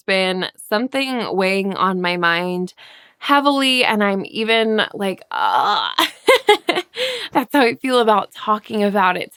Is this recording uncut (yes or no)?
yes